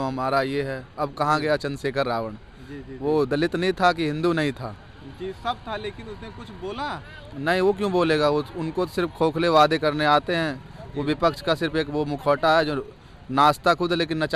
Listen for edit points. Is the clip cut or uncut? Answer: uncut